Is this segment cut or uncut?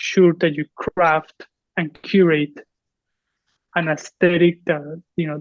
uncut